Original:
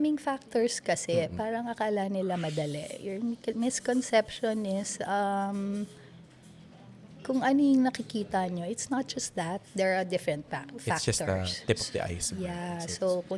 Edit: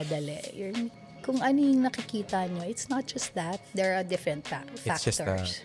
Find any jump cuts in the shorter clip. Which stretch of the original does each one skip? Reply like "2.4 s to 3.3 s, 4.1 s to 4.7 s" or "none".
3.4 s to 6.9 s